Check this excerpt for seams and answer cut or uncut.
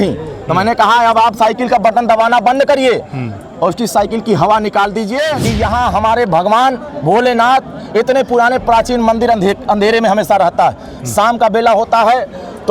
cut